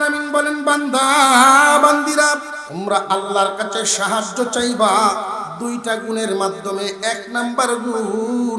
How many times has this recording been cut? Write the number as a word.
one